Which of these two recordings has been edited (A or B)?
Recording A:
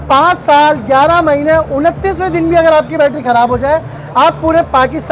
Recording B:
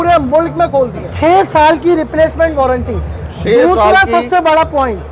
B